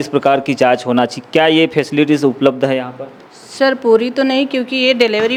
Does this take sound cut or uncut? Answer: uncut